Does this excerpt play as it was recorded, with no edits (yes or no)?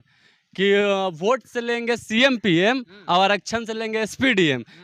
yes